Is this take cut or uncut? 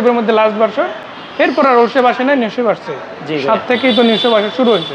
uncut